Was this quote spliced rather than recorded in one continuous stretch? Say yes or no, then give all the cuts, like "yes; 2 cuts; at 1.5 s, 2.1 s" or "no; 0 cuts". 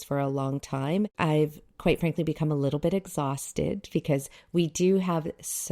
yes; 1 cut; at 1.1 s